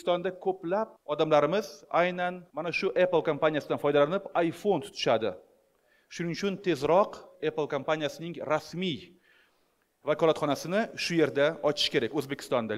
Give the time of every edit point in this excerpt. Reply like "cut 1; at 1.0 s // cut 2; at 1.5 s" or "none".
cut 1; at 1.0 s // cut 2; at 2.5 s